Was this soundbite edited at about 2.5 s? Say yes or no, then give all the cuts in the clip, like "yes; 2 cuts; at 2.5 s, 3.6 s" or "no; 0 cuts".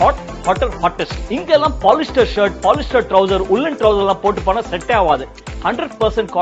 no; 1 cut; at 1.1 s